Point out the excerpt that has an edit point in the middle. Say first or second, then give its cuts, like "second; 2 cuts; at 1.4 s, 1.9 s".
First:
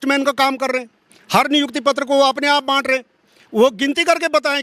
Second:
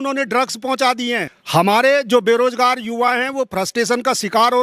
second; 1 cut; at 1.3 s